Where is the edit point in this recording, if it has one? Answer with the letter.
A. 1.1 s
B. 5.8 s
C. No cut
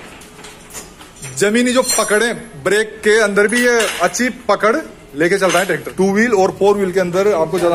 B